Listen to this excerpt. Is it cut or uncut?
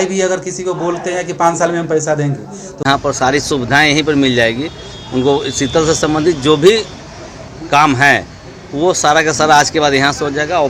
uncut